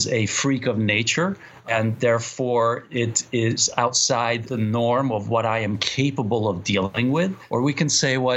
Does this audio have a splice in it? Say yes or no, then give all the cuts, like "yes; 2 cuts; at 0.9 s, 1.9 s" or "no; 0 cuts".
yes; 3 cuts; at 1.6 s, 4.5 s, 7.1 s